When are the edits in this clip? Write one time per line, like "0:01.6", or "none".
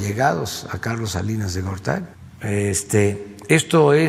0:02.2